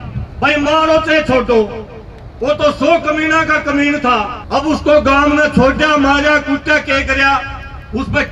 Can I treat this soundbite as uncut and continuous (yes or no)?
no